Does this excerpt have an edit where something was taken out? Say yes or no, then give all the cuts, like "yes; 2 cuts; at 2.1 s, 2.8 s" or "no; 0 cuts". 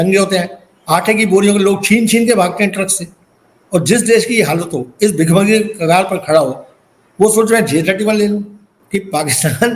yes; 1 cut; at 8.6 s